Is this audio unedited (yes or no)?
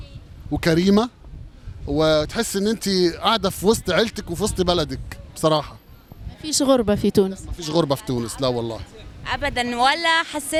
yes